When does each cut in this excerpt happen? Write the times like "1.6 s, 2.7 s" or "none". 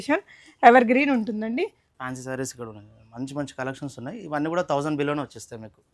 1.9 s